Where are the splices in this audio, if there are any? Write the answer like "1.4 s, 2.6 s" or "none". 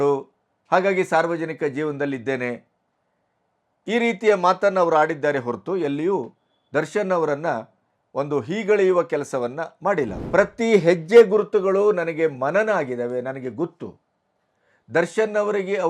10.2 s